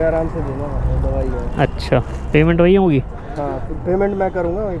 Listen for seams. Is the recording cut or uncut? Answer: uncut